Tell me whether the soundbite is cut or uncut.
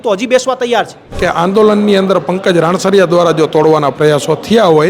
cut